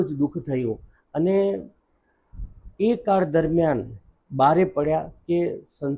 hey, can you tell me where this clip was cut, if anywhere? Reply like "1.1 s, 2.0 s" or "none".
none